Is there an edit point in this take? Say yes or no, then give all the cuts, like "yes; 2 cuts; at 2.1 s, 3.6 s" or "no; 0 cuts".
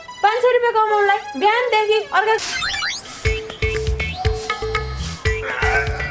yes; 1 cut; at 2.4 s